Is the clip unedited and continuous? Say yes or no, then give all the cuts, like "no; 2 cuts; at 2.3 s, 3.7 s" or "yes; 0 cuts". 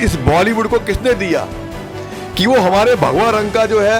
yes; 0 cuts